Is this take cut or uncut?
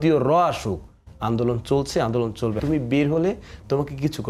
cut